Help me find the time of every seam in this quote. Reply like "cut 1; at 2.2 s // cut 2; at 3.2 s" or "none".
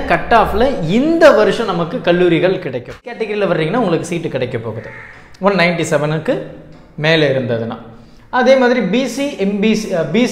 cut 1; at 3.3 s

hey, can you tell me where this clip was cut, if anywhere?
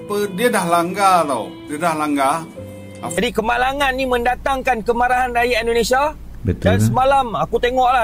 cut 1; at 3.2 s

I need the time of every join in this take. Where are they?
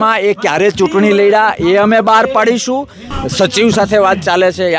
cut 1; at 3.1 s

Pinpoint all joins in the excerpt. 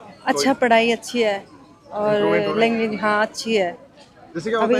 none

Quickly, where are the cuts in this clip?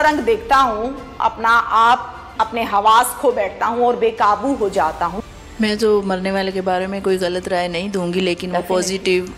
cut 1; at 2.2 s // cut 2; at 5.2 s

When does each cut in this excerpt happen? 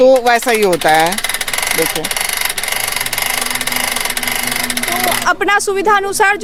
none

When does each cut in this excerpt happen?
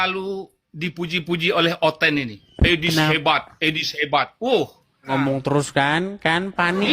cut 1; at 5.1 s

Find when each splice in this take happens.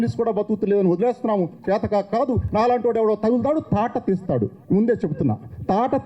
none

